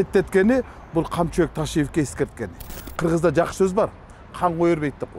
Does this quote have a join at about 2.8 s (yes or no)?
yes